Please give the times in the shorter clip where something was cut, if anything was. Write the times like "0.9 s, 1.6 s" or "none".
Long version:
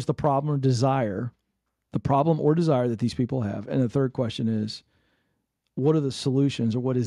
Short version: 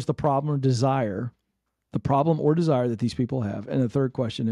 none